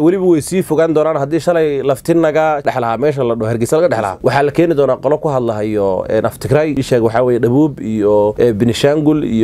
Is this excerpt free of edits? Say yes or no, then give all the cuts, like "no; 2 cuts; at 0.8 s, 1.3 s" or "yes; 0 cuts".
no; 4 cuts; at 2.6 s, 4.1 s, 6.8 s, 8.3 s